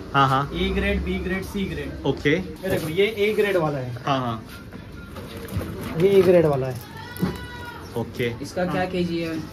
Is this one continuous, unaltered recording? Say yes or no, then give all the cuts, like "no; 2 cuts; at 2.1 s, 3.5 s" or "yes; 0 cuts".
no; 1 cut; at 2.5 s